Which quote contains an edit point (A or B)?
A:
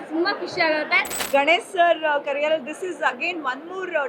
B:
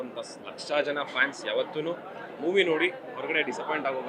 A